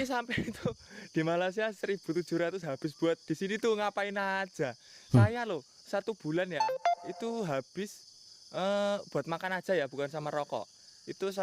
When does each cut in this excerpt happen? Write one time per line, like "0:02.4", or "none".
none